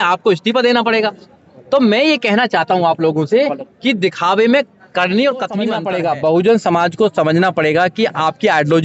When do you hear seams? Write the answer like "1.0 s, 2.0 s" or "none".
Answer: 5.8 s